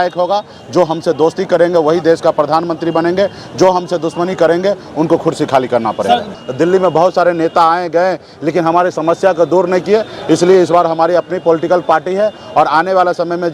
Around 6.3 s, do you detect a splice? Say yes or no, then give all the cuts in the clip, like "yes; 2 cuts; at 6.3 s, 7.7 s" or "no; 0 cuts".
yes; 1 cut; at 6.3 s